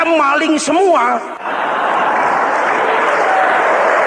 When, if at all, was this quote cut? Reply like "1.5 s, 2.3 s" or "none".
1.4 s